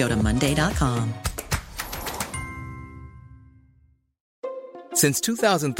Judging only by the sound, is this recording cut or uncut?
cut